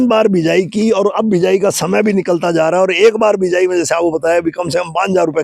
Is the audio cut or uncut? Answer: uncut